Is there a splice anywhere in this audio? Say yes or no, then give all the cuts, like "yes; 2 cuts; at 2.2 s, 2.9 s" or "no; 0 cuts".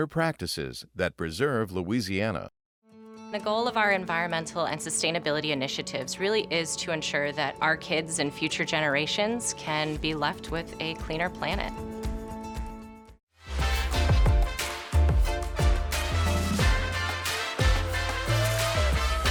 no; 0 cuts